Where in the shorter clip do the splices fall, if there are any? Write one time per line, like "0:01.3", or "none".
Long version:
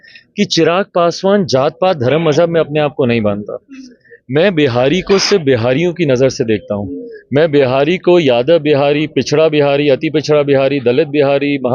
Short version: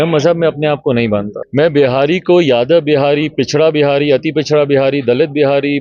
0:01.4